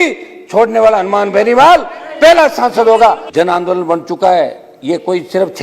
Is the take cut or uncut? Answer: cut